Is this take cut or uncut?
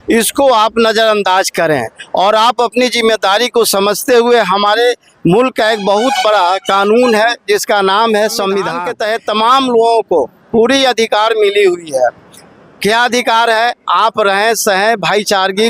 cut